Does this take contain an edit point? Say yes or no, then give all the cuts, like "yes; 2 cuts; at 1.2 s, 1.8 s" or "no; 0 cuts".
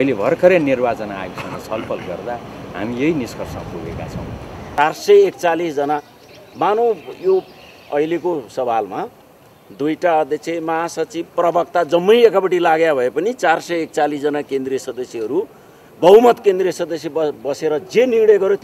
yes; 1 cut; at 4.8 s